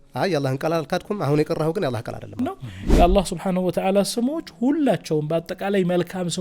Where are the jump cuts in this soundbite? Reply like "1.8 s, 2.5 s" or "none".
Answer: 2.4 s